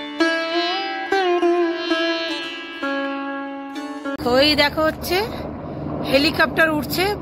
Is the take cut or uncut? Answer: cut